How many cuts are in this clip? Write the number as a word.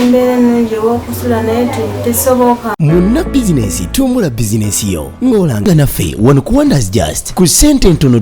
one